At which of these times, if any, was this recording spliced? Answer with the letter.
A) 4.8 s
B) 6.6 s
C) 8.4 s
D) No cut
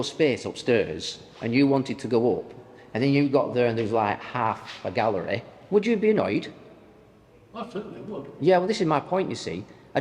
D